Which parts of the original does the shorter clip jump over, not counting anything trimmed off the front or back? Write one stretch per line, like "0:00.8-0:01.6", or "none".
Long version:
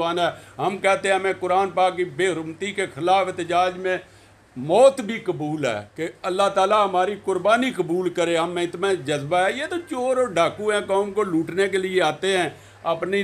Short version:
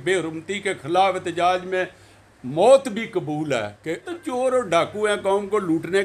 0:06.2-0:09.7